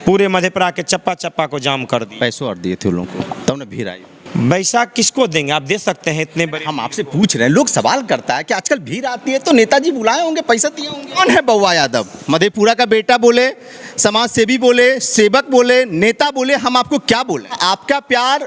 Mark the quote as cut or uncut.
cut